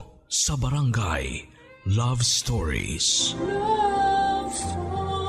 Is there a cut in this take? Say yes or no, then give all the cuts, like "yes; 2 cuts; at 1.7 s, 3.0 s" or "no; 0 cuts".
no; 0 cuts